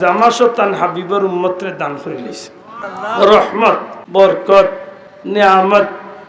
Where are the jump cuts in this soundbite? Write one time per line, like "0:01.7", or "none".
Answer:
0:02.8
0:03.9